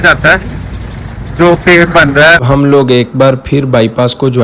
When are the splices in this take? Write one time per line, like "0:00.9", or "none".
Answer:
0:02.4

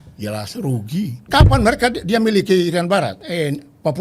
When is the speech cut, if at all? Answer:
0:01.3

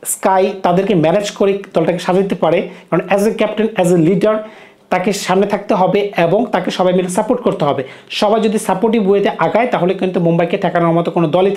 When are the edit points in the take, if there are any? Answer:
none

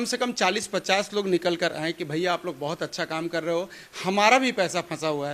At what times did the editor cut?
none

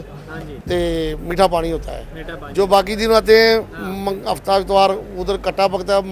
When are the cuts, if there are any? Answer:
none

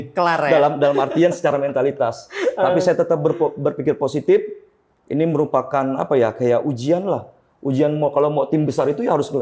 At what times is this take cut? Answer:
none

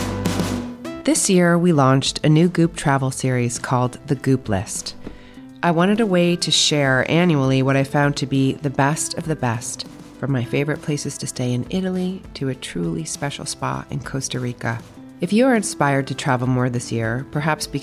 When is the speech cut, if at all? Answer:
0:01.0

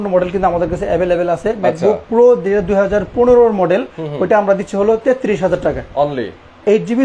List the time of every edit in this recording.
none

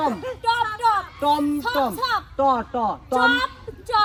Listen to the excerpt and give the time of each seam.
none

